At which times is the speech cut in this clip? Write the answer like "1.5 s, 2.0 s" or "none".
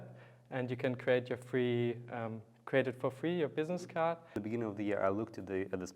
4.4 s